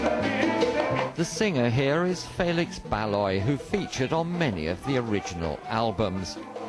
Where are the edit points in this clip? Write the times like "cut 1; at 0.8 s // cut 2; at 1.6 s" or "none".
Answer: cut 1; at 2.0 s